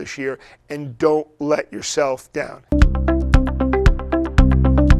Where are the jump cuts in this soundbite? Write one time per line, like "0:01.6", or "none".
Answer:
0:02.6